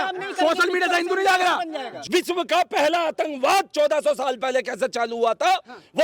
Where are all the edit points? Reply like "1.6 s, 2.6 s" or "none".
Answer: 1.9 s